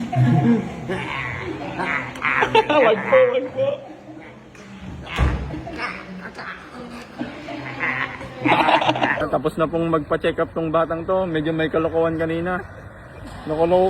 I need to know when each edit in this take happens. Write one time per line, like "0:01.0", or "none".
0:09.2